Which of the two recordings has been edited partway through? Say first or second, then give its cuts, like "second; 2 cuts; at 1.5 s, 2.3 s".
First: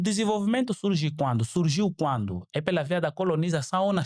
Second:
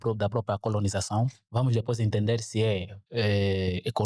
second; 2 cuts; at 1.4 s, 3.0 s